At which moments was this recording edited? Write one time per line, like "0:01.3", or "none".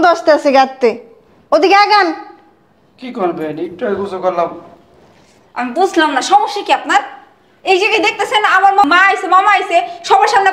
0:08.8